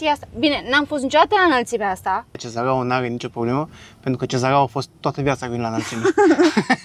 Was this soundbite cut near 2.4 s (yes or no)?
yes